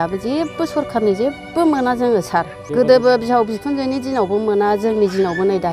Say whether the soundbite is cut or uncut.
cut